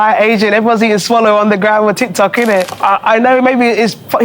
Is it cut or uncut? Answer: cut